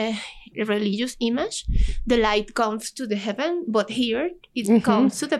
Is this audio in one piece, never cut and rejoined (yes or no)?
yes